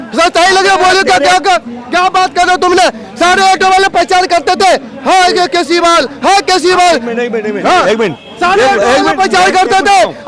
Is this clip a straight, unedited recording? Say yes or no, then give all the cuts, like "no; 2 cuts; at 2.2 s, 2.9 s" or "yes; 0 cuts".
yes; 0 cuts